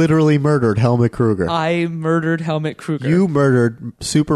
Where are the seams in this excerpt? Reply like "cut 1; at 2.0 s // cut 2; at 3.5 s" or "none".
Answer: none